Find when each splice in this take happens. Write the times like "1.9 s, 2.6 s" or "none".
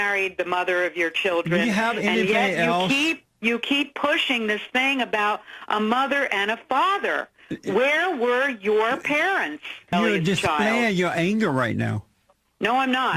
9.9 s